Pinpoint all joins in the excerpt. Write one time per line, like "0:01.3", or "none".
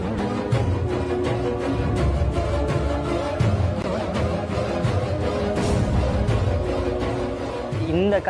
none